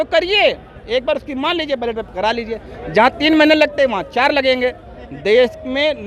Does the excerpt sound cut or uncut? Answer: uncut